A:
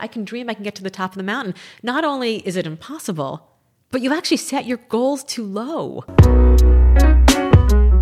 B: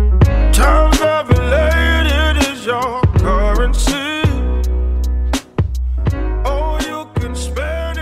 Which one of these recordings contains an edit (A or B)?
A